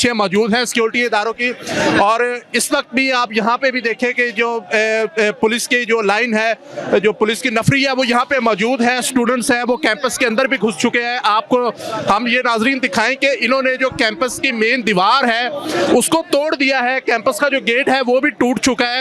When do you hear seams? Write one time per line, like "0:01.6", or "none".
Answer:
none